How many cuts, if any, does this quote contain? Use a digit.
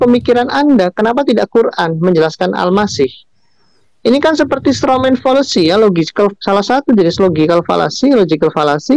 0